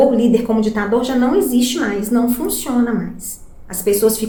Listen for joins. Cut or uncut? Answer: uncut